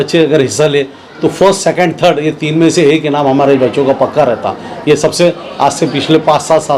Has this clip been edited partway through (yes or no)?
no